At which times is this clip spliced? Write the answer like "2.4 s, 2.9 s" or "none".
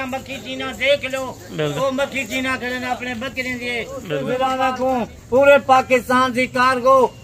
4.3 s